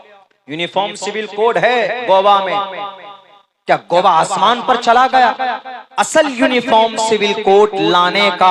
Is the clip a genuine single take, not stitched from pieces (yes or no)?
no